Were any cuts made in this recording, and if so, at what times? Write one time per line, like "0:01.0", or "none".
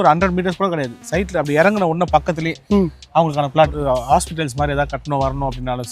0:03.8